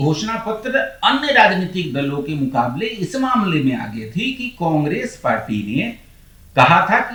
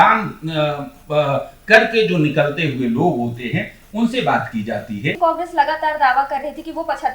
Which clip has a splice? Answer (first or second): second